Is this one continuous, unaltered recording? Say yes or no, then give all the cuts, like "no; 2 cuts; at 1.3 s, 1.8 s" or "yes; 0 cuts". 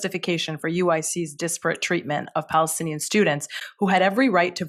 yes; 0 cuts